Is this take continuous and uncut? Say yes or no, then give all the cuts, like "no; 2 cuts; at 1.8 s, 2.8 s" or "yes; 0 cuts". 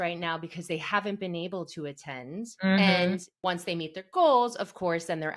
no; 2 cuts; at 2.5 s, 3.3 s